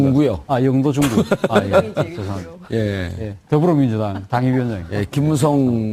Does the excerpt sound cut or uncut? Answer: cut